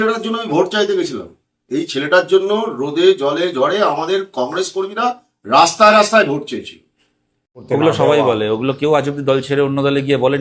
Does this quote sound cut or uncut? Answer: cut